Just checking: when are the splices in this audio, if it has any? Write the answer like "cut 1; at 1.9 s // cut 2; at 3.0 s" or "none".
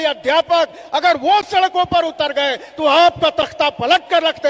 none